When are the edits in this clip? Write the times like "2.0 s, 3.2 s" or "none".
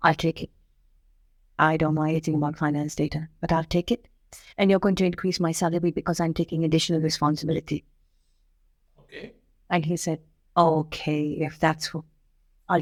none